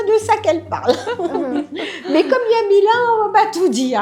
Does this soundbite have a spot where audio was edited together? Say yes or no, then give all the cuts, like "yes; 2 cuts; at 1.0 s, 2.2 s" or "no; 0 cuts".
no; 0 cuts